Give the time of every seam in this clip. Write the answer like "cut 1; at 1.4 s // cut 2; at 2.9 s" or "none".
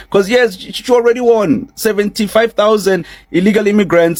none